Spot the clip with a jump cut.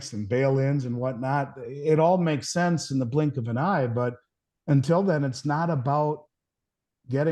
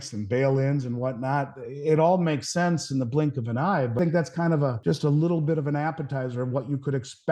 second; 2 cuts; at 4.0 s, 4.8 s

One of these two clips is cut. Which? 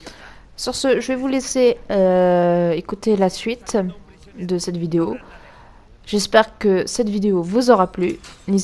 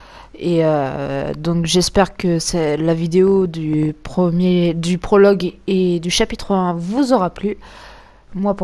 first; 1 cut; at 2.9 s

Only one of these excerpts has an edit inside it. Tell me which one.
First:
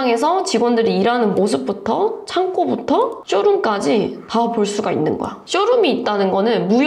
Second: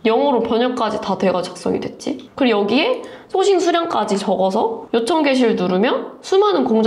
first; 1 cut; at 5.4 s

